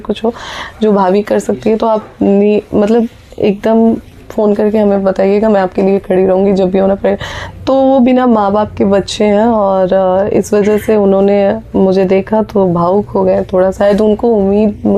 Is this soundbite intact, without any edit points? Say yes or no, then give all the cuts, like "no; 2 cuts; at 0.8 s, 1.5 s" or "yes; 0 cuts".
yes; 0 cuts